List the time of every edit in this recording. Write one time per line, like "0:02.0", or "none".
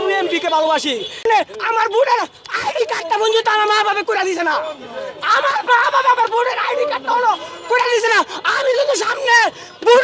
0:01.2